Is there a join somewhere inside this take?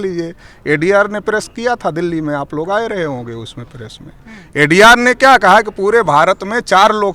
no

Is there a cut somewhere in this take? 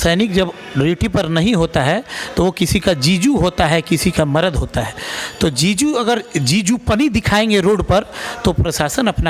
no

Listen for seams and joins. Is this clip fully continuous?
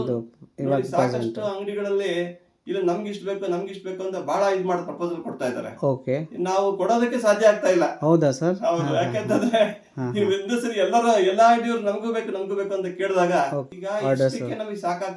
no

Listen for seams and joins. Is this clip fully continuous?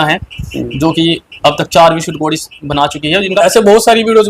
no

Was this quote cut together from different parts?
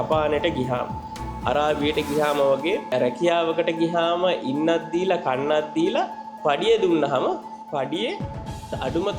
yes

